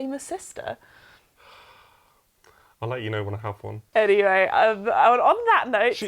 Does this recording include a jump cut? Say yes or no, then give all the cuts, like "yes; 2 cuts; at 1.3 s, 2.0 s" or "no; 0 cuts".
yes; 1 cut; at 3.9 s